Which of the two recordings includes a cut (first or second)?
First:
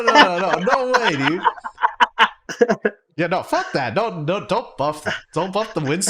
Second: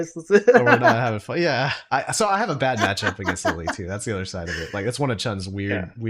first